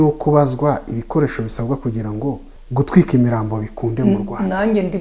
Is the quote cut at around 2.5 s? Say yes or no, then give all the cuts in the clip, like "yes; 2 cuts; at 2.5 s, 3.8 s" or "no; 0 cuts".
yes; 1 cut; at 2.5 s